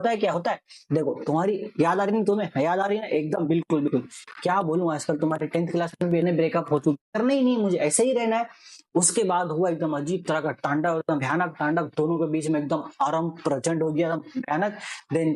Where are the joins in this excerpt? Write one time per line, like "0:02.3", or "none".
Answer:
0:07.0